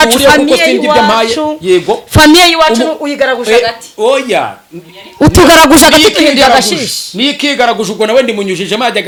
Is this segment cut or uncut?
uncut